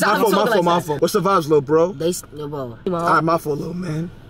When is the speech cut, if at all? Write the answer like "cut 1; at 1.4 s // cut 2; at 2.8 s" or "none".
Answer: cut 1; at 1.0 s // cut 2; at 2.9 s